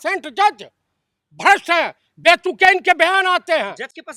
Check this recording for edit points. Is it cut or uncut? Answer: uncut